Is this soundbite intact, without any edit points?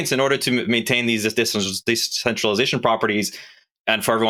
yes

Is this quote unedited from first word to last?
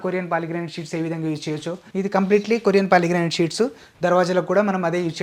no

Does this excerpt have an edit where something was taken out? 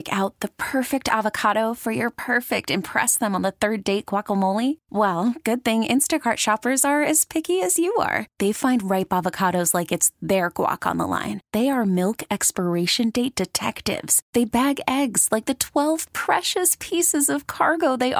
no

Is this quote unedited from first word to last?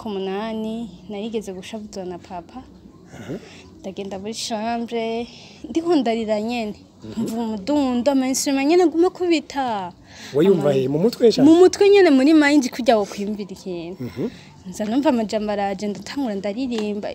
yes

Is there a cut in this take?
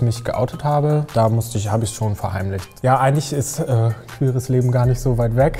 yes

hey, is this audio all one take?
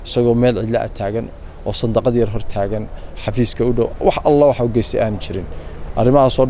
yes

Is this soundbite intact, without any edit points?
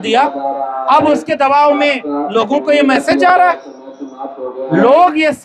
yes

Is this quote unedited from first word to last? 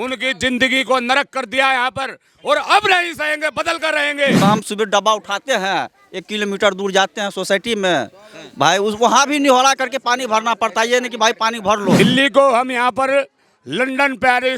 no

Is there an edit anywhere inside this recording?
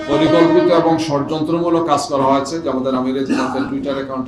no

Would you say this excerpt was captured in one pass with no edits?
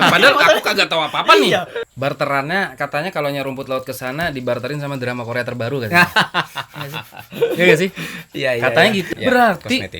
no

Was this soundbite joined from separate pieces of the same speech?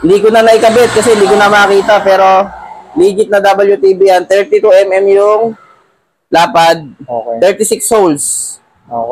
no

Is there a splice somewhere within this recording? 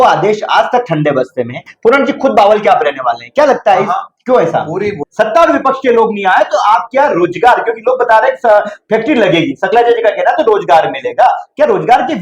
yes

